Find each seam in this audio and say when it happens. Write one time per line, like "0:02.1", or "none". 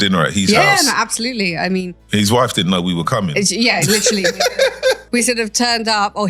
none